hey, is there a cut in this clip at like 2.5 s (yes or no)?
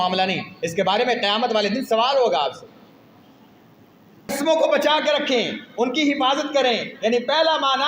no